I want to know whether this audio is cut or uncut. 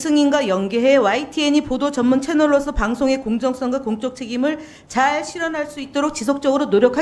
uncut